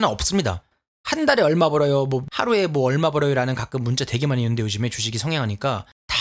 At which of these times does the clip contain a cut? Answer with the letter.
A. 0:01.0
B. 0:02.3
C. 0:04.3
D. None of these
B